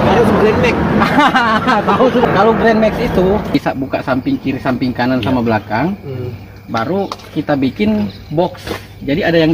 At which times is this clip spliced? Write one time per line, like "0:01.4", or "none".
0:02.3
0:03.5